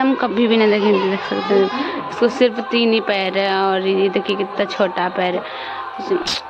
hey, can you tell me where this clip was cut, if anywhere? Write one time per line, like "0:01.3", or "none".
none